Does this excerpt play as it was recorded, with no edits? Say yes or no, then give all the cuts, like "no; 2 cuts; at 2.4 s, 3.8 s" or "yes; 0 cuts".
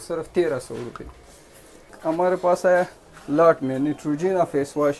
no; 1 cut; at 1.9 s